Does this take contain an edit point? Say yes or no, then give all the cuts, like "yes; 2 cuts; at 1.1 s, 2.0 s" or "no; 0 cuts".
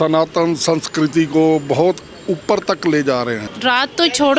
yes; 1 cut; at 3.5 s